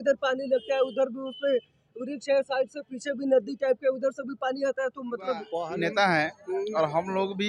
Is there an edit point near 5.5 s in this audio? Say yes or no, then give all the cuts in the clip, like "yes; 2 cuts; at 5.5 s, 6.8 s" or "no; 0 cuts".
yes; 1 cut; at 5.5 s